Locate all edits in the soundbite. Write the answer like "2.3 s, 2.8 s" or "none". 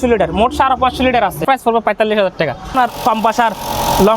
1.4 s, 2.7 s

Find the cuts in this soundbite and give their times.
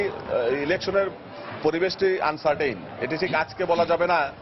none

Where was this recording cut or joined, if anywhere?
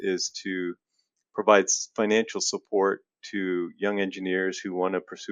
none

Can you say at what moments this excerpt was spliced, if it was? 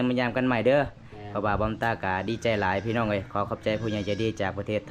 none

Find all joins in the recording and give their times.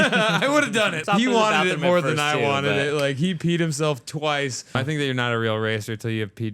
1.0 s, 4.7 s

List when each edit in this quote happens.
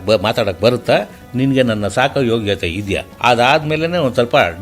3.1 s

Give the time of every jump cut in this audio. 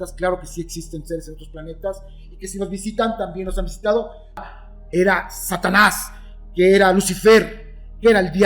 4.4 s

